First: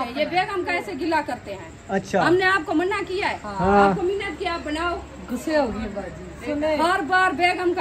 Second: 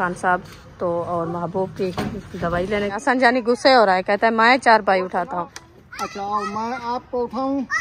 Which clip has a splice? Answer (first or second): second